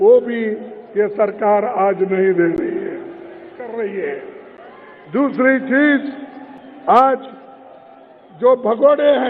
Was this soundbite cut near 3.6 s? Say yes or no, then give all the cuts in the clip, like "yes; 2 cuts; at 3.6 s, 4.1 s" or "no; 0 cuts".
yes; 1 cut; at 3.6 s